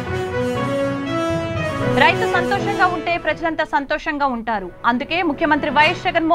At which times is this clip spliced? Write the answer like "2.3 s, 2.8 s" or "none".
none